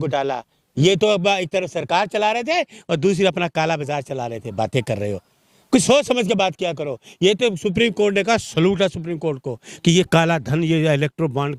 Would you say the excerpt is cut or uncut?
uncut